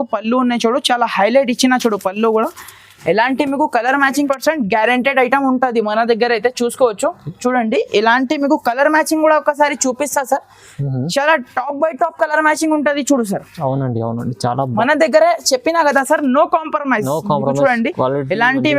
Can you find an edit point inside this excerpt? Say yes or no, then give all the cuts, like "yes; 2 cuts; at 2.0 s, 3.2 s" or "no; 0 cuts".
yes; 2 cuts; at 4.3 s, 14.7 s